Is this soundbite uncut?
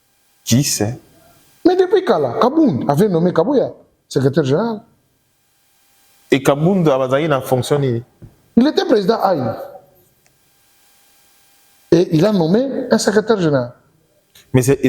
yes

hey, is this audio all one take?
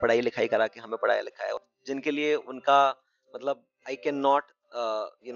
no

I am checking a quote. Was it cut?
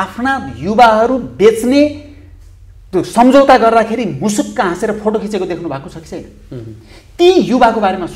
no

